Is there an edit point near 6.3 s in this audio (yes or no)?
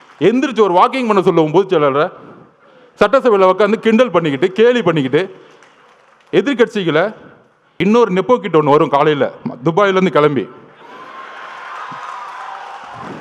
no